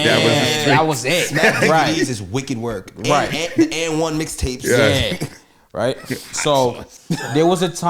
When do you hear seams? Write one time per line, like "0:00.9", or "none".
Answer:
none